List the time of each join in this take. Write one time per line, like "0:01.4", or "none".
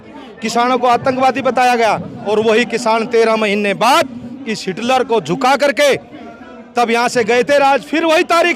0:02.1